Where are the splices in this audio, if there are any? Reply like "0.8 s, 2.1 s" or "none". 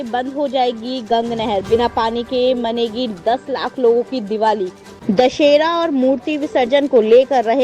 4.9 s

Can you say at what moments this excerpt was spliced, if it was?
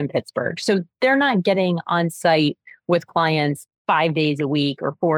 3.7 s

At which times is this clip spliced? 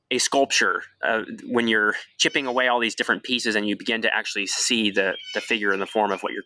none

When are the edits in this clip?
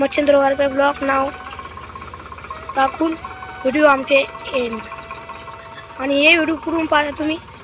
none

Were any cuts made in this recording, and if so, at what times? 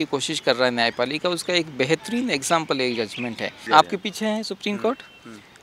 3.6 s

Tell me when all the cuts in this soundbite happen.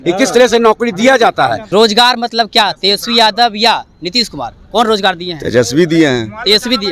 1.6 s

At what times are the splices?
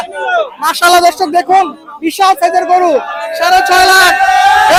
none

